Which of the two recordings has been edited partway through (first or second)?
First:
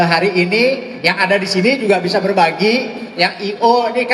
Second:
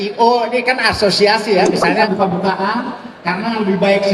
second